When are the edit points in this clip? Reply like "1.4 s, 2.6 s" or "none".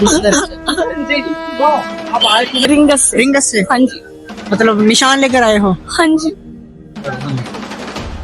2.7 s